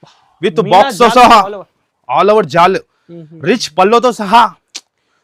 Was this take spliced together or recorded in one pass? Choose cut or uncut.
uncut